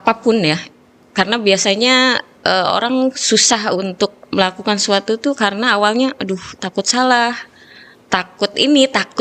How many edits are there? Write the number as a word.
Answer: zero